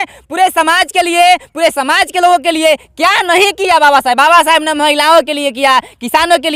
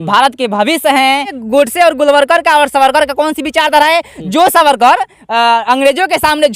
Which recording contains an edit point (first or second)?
second